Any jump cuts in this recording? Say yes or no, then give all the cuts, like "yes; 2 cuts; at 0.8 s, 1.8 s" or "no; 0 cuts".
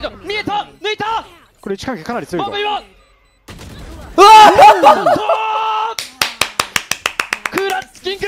no; 0 cuts